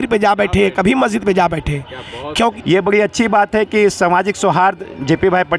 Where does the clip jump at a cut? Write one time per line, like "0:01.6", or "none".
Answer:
0:02.5